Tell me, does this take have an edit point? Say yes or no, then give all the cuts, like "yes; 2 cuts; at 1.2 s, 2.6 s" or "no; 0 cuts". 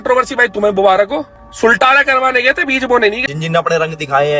yes; 2 cuts; at 1.4 s, 3.2 s